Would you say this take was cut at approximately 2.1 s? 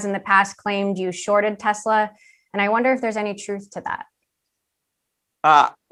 no; 0 cuts

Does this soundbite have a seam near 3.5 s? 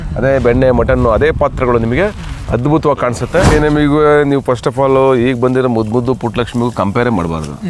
yes; 1 cut; at 3.5 s

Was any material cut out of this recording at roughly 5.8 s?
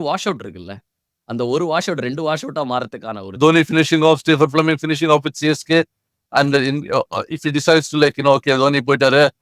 no; 1 cut; at 3.4 s

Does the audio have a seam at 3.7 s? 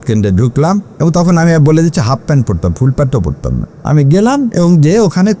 yes; 1 cut; at 3.7 s

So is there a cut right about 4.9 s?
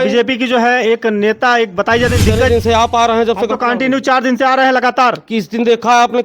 no; 1 cut; at 2.4 s

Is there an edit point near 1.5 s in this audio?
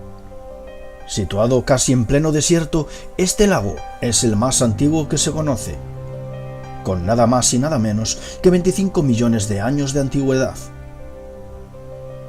no; 1 cut; at 4.5 s

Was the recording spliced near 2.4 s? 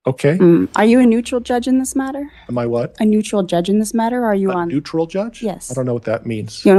no; 0 cuts

